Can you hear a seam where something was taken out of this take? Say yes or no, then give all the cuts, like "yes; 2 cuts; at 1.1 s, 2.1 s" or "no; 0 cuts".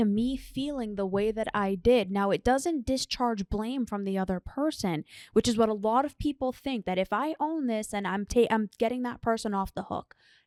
no; 0 cuts